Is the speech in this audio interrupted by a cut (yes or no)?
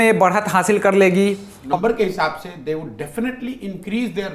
yes